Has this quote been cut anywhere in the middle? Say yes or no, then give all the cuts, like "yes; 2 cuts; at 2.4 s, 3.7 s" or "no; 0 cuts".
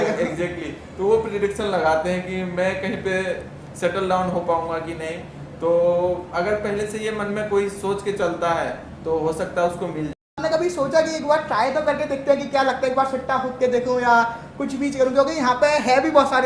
yes; 1 cut; at 10.4 s